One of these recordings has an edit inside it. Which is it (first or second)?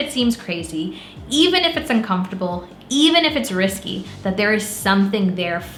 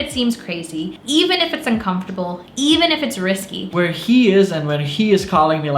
second